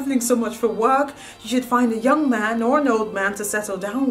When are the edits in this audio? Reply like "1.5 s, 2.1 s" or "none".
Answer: none

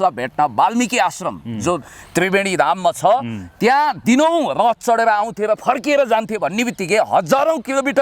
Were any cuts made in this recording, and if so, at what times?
none

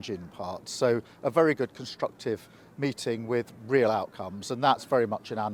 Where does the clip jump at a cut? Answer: none

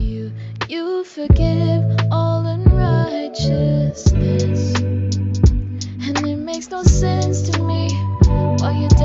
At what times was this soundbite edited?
none

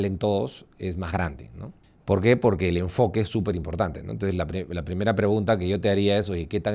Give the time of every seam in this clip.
none

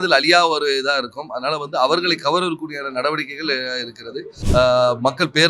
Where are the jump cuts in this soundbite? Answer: 4.3 s

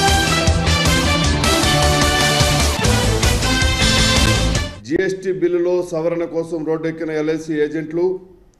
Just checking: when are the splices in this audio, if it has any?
none

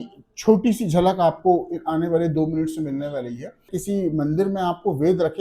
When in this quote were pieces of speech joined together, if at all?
3.7 s

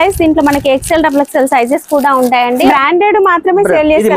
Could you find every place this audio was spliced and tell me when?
2.7 s

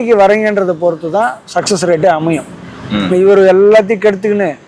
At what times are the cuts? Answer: none

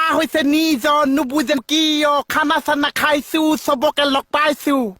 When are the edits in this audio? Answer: 1.6 s

